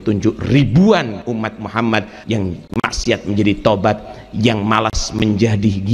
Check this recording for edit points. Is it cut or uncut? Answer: cut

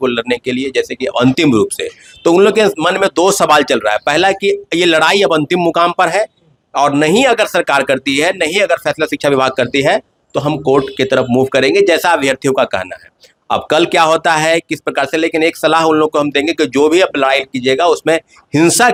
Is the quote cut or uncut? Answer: uncut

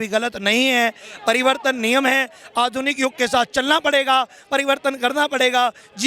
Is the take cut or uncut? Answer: uncut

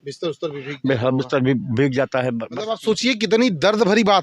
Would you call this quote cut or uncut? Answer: cut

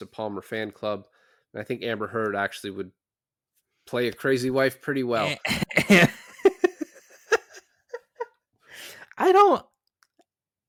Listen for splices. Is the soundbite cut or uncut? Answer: uncut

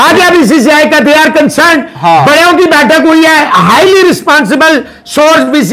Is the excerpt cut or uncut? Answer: uncut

